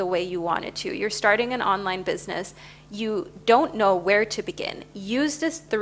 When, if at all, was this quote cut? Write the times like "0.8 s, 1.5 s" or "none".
none